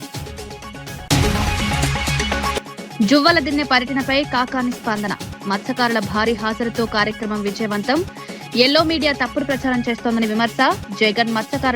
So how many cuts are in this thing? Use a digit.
2